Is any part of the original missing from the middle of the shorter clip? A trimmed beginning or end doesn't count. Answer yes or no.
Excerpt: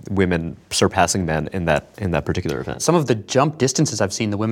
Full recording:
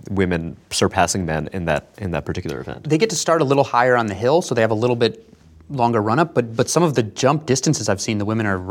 yes